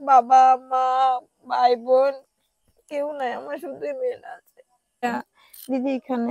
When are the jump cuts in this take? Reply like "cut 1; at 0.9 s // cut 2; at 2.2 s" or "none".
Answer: cut 1; at 5.0 s